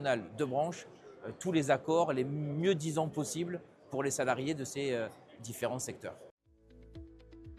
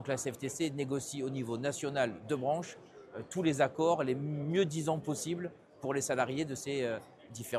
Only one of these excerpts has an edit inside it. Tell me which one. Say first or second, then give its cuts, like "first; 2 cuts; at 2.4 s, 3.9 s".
first; 1 cut; at 6.6 s